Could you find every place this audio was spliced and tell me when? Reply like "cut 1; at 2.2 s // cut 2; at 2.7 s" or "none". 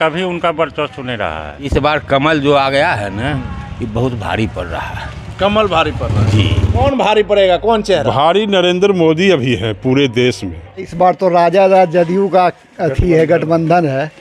cut 1; at 1.7 s // cut 2; at 6.8 s // cut 3; at 10.9 s

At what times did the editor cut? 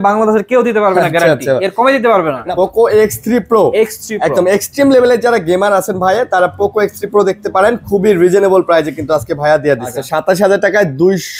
cut 1; at 2.4 s // cut 2; at 10.0 s

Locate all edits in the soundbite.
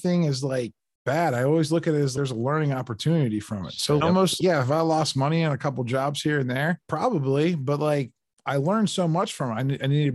none

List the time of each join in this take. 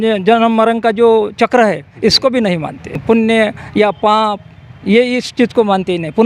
cut 1; at 3.0 s

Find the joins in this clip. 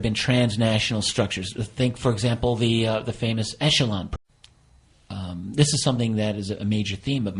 none

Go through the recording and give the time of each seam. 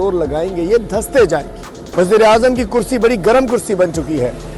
cut 1; at 1.8 s

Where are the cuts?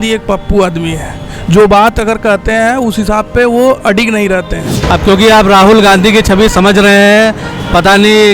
cut 1; at 4.7 s

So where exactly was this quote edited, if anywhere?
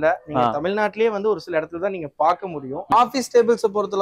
cut 1; at 2.8 s

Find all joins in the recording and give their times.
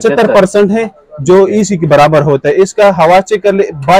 none

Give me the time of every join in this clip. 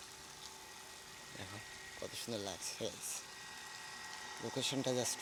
none

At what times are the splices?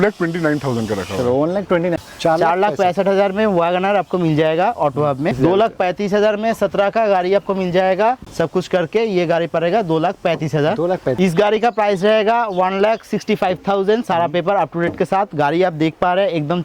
cut 1; at 1.9 s // cut 2; at 5.3 s // cut 3; at 8.2 s // cut 4; at 11.2 s

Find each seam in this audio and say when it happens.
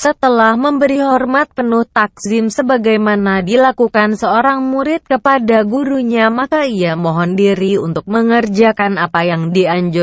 cut 1; at 4.4 s

